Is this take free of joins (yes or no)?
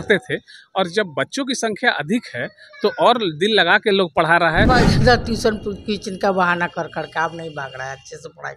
no